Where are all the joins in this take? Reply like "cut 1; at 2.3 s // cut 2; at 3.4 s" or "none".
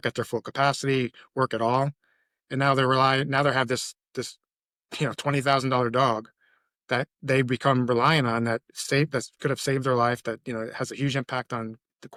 none

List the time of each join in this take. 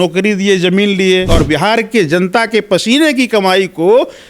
cut 1; at 1.3 s

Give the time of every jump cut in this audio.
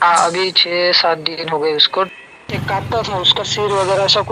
cut 1; at 2.1 s

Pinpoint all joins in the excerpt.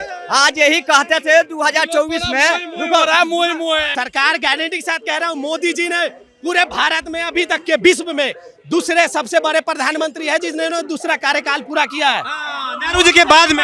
cut 1; at 3.9 s

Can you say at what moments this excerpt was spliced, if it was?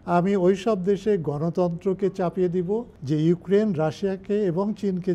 cut 1; at 2.9 s

